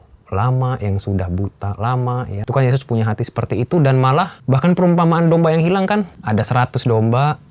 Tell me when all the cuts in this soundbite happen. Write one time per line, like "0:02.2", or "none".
0:02.4
0:04.4
0:06.2